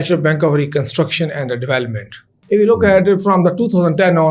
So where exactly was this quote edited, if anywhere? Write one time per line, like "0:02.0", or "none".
0:02.3